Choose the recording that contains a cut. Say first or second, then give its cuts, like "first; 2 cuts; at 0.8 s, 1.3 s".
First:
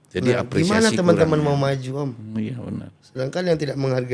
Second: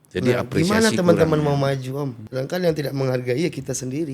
second; 1 cut; at 2.2 s